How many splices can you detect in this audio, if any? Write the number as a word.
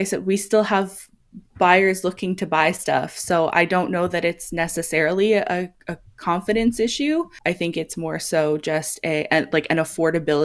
one